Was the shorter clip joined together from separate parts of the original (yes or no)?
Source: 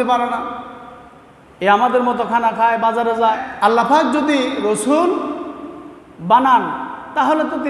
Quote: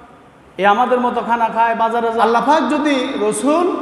yes